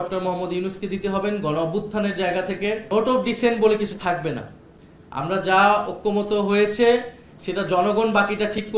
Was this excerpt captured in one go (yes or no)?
no